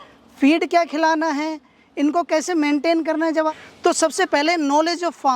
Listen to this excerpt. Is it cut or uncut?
cut